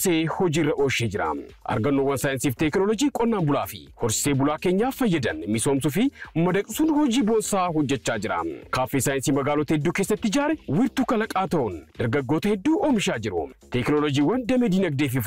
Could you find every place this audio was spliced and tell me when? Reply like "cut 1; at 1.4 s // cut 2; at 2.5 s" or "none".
none